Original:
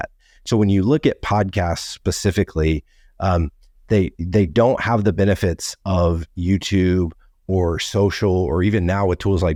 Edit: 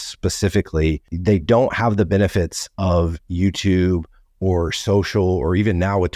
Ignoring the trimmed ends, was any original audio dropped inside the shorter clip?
yes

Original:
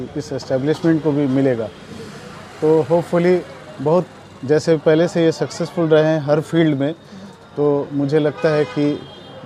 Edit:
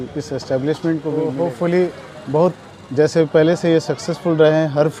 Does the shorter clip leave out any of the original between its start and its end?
yes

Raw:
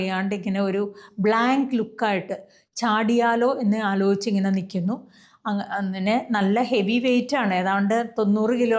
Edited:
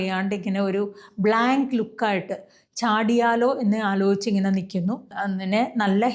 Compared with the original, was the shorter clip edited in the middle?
yes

